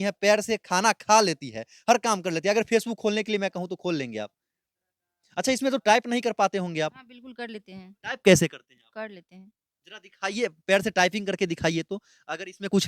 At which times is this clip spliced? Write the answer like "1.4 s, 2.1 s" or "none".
none